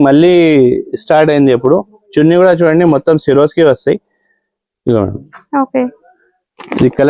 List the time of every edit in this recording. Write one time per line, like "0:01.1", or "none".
none